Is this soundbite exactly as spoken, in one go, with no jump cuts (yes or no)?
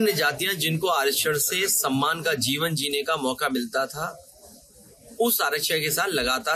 yes